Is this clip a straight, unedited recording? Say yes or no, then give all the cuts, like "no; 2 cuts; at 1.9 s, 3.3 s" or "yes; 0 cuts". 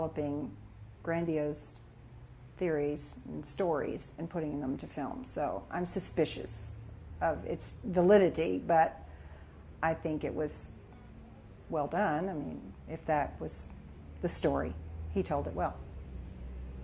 yes; 0 cuts